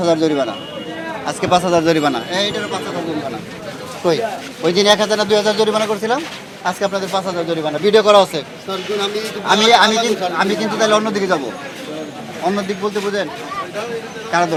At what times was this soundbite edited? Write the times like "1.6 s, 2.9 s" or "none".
none